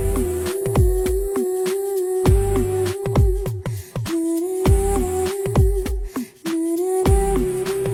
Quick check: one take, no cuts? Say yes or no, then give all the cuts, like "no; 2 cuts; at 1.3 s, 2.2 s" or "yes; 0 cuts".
yes; 0 cuts